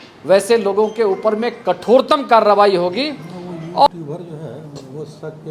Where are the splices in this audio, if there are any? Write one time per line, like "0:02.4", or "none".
0:03.9